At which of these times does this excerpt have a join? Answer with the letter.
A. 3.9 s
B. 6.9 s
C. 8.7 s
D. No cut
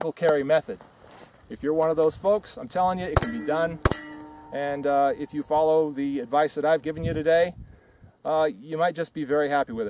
B